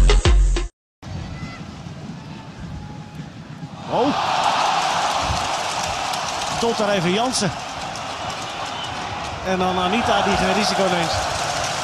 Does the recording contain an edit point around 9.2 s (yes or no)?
yes